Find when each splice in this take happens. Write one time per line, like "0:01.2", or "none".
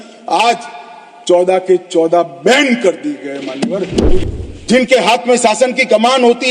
0:04.2